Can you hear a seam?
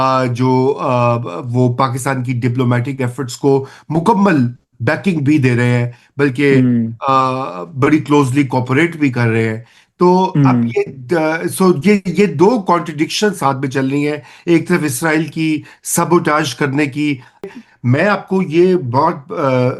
yes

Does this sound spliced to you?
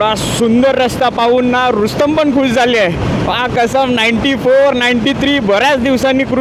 no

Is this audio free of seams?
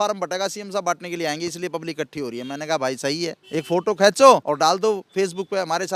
no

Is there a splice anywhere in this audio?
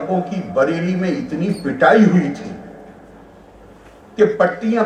no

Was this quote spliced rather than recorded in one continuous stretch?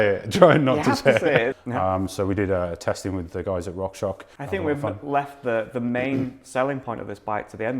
yes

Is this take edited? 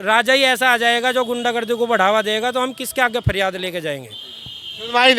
no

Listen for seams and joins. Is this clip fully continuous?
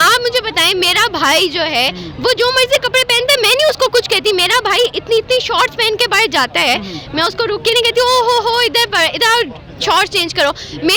yes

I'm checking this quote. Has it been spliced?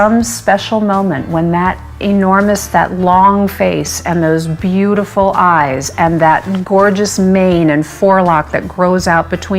no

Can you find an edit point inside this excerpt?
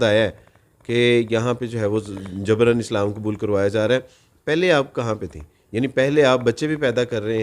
no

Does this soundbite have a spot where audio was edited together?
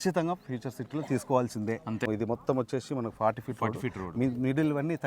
yes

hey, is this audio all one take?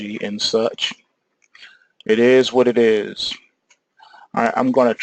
no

